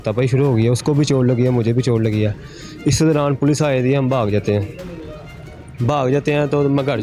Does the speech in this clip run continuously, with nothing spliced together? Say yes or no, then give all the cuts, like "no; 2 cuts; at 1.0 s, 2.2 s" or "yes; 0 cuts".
yes; 0 cuts